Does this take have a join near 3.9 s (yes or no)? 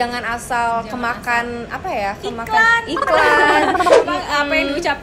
yes